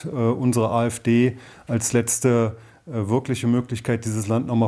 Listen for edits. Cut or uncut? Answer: uncut